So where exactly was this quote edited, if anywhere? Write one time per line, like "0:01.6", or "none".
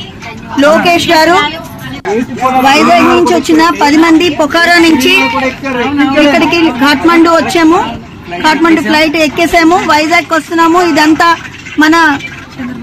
0:02.0